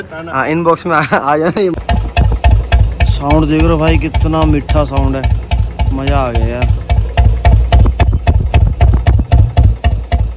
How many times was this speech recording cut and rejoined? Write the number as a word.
one